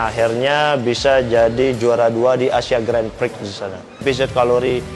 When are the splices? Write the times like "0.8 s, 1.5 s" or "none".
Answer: 4.0 s